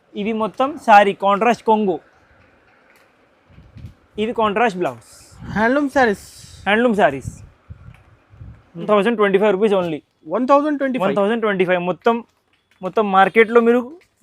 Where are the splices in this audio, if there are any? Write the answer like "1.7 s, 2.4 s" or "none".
8.8 s